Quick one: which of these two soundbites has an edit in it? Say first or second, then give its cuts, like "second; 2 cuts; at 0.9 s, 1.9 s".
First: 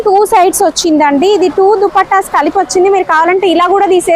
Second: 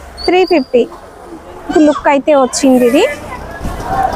second; 1 cut; at 1.7 s